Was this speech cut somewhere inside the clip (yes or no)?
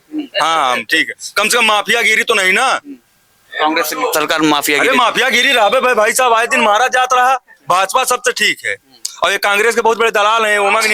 no